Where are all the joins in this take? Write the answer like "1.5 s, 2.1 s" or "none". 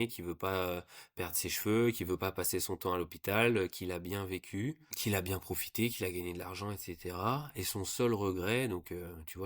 5.0 s